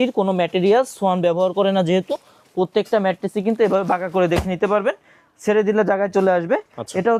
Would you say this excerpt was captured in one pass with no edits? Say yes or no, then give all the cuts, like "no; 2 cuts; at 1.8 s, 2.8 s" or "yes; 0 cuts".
yes; 0 cuts